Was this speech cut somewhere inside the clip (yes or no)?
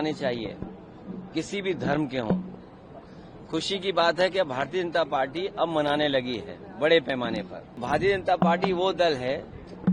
yes